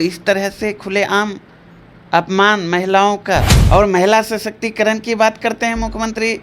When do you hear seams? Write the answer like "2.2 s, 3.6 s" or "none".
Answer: 3.6 s